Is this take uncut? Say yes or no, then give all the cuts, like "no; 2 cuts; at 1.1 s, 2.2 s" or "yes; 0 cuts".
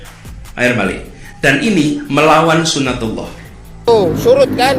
no; 1 cut; at 3.9 s